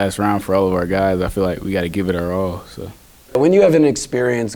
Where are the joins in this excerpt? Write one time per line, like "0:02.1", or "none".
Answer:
0:03.4